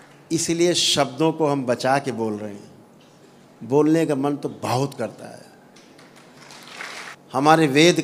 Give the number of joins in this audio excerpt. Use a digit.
1